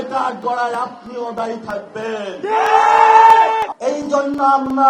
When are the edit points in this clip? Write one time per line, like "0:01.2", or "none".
0:03.7